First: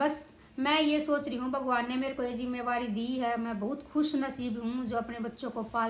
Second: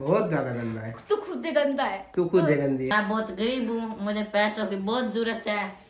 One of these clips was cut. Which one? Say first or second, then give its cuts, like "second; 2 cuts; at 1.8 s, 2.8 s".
second; 1 cut; at 2.9 s